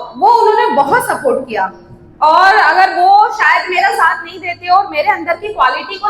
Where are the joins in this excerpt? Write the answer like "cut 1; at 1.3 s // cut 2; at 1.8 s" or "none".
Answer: none